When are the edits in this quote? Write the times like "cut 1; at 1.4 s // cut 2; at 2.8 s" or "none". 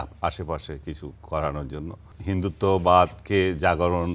cut 1; at 2.1 s